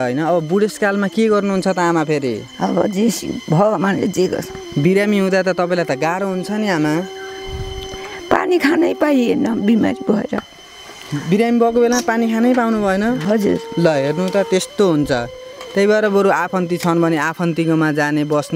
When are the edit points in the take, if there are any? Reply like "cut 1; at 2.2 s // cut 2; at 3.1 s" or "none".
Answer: none